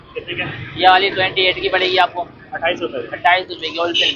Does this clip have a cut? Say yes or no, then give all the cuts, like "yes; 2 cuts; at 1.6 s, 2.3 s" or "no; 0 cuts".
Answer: no; 0 cuts